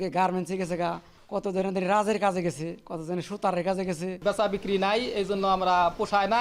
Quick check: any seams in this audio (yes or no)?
yes